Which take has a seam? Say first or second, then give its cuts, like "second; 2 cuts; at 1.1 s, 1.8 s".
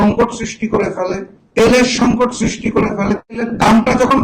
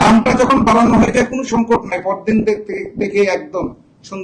first; 1 cut; at 1.3 s